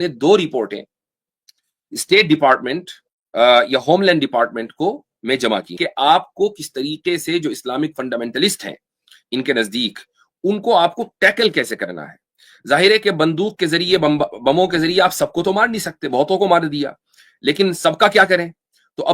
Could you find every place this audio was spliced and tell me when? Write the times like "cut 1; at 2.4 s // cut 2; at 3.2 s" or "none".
cut 1; at 5.7 s